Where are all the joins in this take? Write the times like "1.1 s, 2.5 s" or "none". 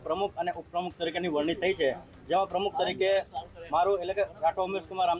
none